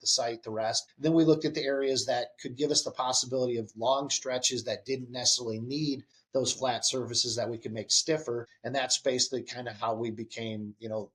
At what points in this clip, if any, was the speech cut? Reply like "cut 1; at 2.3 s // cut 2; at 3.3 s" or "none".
cut 1; at 0.9 s // cut 2; at 6.1 s // cut 3; at 8.6 s